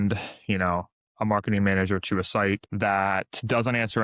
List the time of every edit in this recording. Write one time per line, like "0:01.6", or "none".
0:02.7

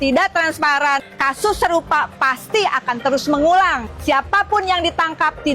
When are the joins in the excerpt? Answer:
0:01.1
0:03.9

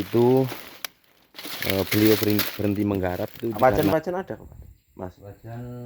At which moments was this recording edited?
0:03.5

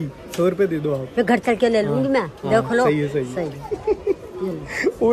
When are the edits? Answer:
none

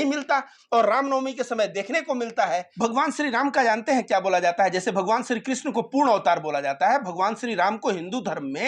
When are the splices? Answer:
0:02.7

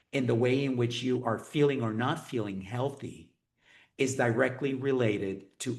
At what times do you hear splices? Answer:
none

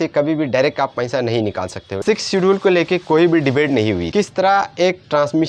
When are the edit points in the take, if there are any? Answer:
0:02.0
0:04.1

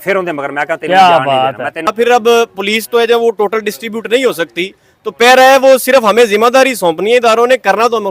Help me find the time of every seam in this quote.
0:01.9

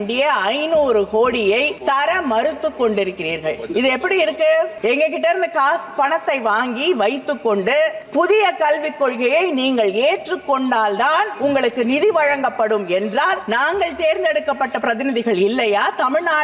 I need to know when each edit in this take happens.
0:01.7
0:04.7
0:08.0
0:11.3
0:13.4

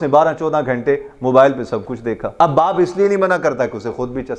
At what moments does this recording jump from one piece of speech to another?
0:02.2

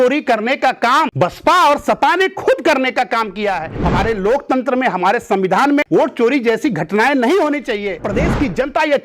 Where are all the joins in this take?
0:01.1
0:03.8
0:05.9
0:08.0

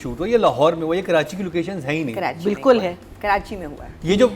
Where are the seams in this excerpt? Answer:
none

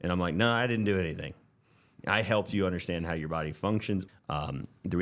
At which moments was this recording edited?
0:04.0

